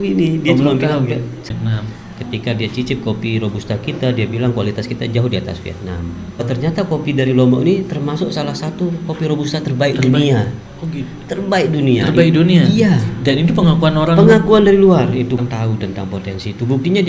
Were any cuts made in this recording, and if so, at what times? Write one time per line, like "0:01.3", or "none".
0:01.5
0:06.4
0:15.4